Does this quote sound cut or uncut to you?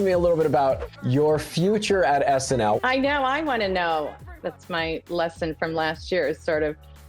cut